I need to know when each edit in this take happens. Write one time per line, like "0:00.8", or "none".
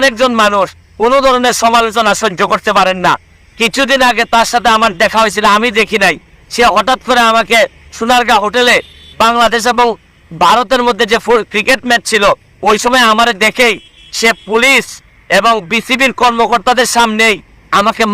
none